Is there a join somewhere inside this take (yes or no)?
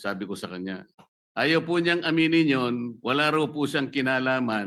no